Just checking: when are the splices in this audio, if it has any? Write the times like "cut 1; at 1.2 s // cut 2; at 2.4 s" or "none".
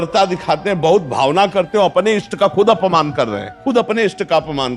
cut 1; at 3.5 s